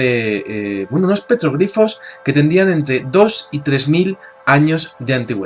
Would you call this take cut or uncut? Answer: uncut